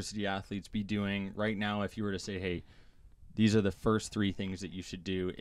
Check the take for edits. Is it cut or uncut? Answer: uncut